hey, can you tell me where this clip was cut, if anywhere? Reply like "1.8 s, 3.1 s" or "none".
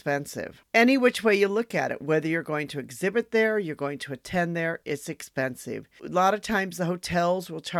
6.0 s